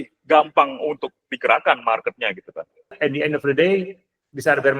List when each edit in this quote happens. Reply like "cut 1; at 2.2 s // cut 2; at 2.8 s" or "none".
cut 1; at 3.0 s